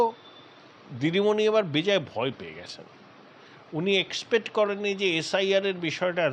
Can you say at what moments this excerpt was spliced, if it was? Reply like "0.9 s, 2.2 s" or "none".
none